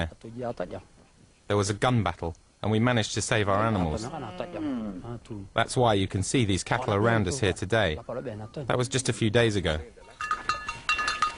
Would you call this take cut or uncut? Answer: uncut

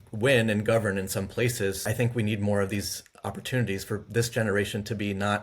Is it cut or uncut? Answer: cut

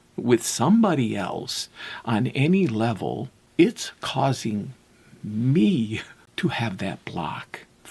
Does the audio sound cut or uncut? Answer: cut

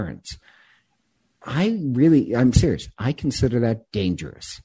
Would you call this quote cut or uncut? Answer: uncut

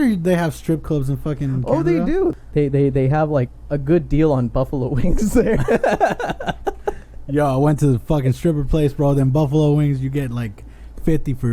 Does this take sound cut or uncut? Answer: cut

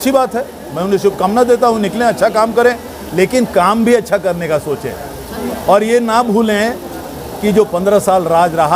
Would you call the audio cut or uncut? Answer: uncut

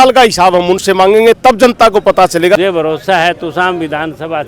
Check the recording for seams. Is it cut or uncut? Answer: cut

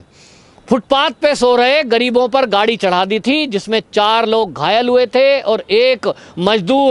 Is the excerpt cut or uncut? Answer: uncut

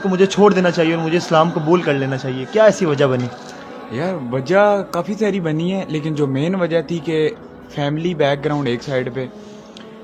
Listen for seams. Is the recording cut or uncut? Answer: uncut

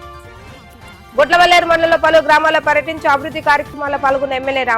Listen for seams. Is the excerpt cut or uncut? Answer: cut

